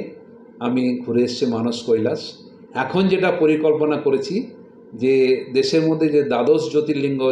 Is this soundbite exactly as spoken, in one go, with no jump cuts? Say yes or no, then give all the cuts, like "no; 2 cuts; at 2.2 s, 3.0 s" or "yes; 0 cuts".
yes; 0 cuts